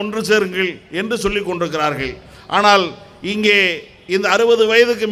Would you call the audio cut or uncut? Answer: uncut